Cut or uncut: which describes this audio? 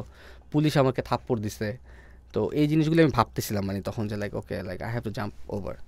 uncut